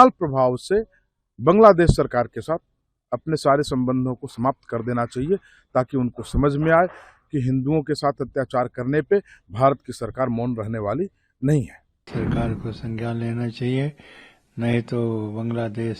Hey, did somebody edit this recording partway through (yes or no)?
yes